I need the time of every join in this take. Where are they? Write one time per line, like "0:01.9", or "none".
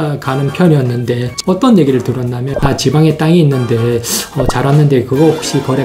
0:01.3
0:02.5